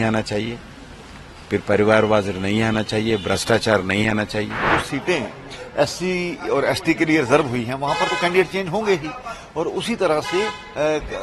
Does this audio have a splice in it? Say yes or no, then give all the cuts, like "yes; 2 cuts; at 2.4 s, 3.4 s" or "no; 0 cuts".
yes; 1 cut; at 4.7 s